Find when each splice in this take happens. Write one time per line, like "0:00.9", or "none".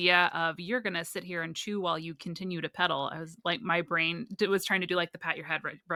none